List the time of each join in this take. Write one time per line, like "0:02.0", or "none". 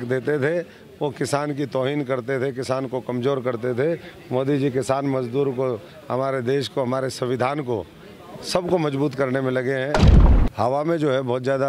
0:10.2